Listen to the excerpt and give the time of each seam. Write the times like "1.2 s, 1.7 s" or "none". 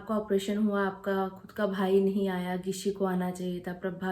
none